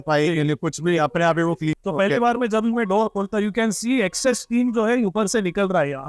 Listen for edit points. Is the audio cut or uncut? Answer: cut